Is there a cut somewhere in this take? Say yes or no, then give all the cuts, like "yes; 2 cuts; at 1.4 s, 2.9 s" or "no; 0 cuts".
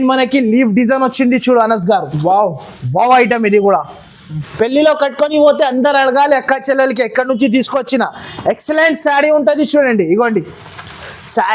yes; 1 cut; at 4.4 s